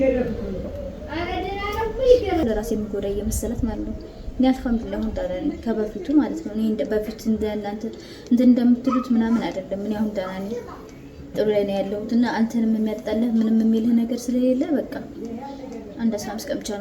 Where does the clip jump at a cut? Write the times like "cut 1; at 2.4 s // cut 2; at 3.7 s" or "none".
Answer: cut 1; at 2.4 s